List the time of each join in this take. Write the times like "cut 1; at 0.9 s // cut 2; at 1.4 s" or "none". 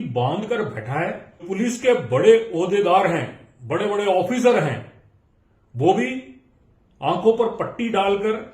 cut 1; at 1.4 s